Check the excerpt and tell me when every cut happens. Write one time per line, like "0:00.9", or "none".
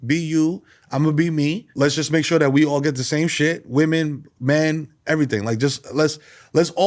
0:01.6